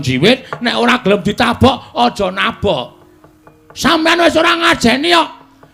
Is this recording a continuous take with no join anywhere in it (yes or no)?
yes